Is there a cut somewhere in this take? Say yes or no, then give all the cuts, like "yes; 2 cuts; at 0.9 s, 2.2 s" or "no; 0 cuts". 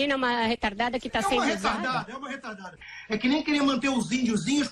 yes; 1 cut; at 2.8 s